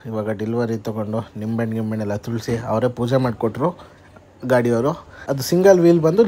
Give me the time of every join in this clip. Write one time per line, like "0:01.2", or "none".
0:05.1